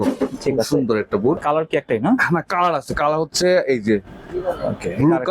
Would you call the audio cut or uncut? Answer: cut